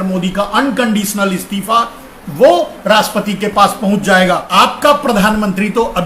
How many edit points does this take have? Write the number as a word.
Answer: one